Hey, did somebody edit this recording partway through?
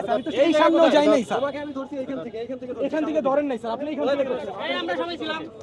no; 0 cuts

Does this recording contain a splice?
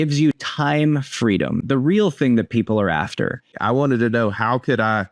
yes; 1 cut; at 3.5 s

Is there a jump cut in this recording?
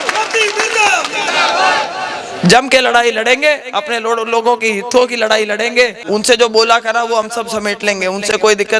yes; 1 cut; at 6.0 s

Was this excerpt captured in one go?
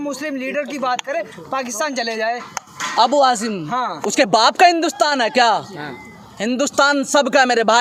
yes; 0 cuts

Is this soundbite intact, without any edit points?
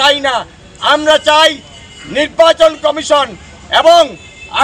yes; 0 cuts

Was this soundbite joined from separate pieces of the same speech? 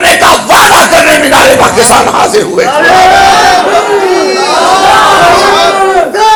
no; 0 cuts

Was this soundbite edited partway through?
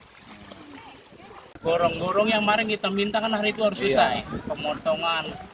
yes; 1 cut; at 1.6 s

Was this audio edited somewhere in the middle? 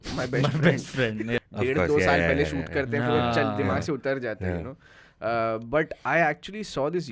yes; 1 cut; at 1.4 s

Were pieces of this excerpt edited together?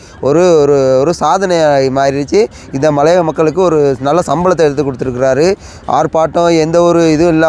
no; 0 cuts

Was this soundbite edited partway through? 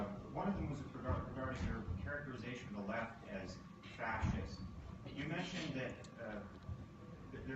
yes; 1 cut; at 5.7 s

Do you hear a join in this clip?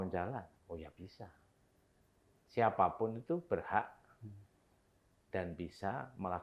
no; 0 cuts

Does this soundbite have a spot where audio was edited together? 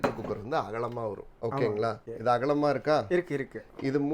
yes; 2 cuts; at 1.3 s, 2.0 s

